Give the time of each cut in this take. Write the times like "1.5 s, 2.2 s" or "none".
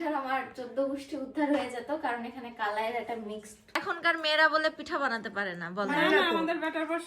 3.8 s